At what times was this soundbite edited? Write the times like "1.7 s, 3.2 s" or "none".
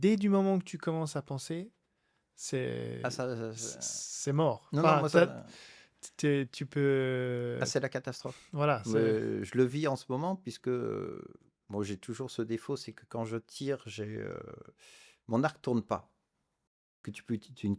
16.7 s